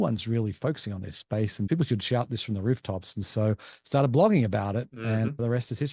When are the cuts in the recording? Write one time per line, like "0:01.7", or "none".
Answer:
0:01.7